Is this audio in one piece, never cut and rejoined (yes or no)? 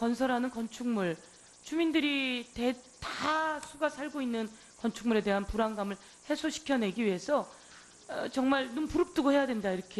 no